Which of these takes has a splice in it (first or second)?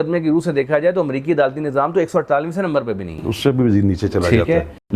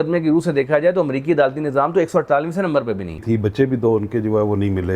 second